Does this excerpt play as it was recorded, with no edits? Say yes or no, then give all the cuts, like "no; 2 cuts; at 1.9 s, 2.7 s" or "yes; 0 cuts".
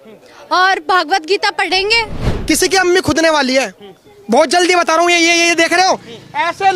no; 1 cut; at 2.2 s